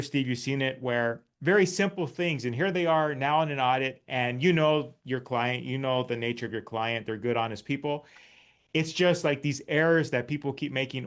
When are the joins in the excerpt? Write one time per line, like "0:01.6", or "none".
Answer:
none